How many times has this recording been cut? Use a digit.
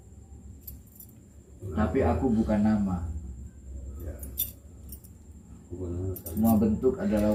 0